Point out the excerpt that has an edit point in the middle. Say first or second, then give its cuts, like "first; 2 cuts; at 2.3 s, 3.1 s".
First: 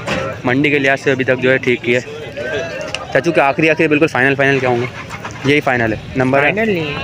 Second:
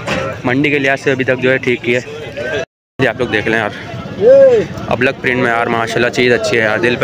second; 1 cut; at 2.9 s